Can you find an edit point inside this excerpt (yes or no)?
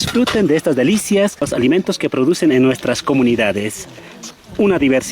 yes